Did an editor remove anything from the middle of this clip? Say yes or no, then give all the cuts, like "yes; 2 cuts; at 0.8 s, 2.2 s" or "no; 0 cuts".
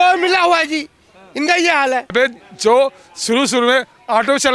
yes; 1 cut; at 2.1 s